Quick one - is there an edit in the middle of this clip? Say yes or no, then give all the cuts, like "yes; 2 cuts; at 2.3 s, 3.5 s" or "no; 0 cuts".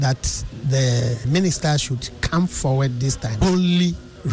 yes; 2 cuts; at 1.3 s, 3.4 s